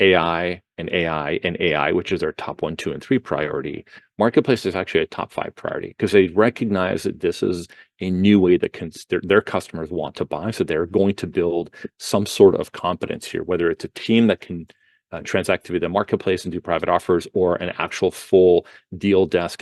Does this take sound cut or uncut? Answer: uncut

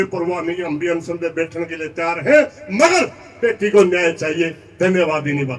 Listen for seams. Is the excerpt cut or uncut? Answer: uncut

